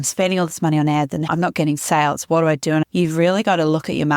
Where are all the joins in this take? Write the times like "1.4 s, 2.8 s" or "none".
1.3 s, 2.9 s